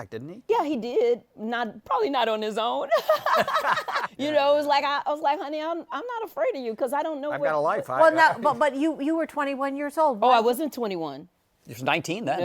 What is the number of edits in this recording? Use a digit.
1